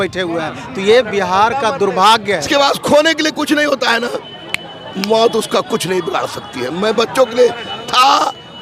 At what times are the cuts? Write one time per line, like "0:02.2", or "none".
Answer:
0:02.5